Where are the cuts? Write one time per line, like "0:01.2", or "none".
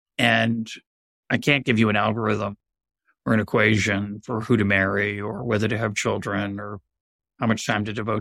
0:01.2

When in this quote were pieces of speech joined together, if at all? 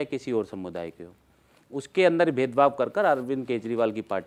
none

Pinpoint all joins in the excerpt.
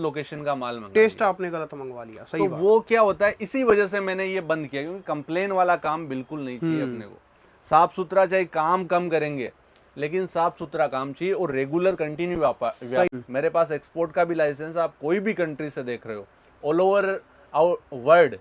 0:13.1

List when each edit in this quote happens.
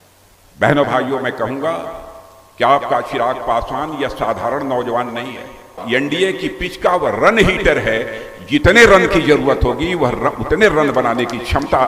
0:05.8

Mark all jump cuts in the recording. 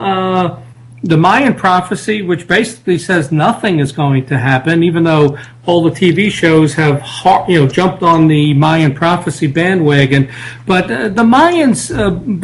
0:05.7

